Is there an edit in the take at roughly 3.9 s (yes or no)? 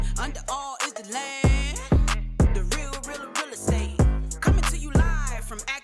yes